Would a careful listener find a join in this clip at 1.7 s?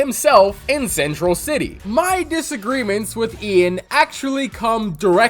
yes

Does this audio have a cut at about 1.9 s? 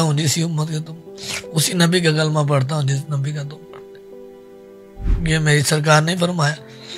no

